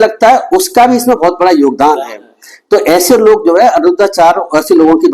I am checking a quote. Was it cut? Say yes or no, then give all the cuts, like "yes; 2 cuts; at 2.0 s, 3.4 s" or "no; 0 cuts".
no; 0 cuts